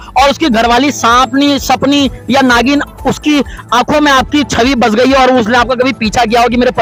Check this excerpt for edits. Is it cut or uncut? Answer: uncut